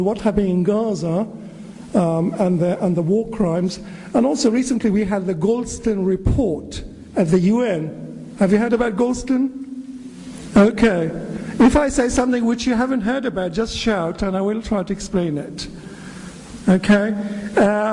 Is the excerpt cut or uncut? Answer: cut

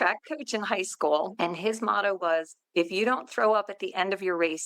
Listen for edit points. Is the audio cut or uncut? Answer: cut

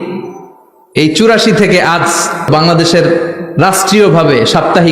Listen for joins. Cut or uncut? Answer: cut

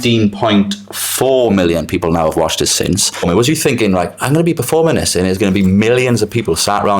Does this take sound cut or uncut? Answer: cut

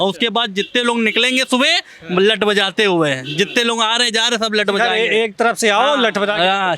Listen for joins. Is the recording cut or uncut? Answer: uncut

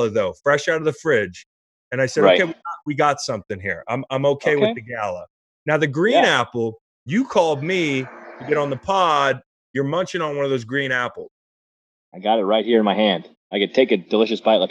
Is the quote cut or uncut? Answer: uncut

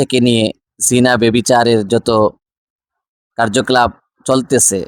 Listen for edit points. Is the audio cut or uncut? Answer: uncut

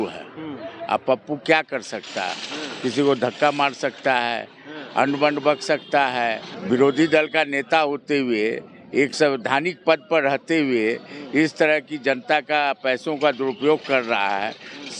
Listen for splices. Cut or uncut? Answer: uncut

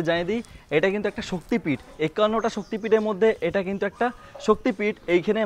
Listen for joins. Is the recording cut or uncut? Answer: uncut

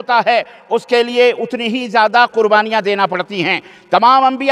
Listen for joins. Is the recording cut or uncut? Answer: uncut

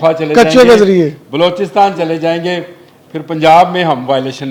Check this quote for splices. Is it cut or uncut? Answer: uncut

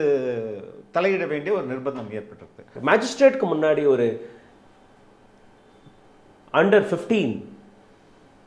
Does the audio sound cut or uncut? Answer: cut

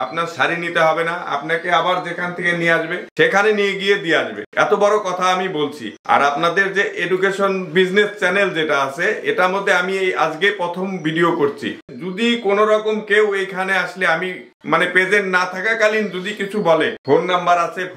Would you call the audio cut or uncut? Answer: uncut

